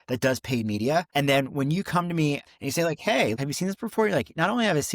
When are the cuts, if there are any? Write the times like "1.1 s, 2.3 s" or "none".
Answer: 1.1 s, 2.4 s, 3.3 s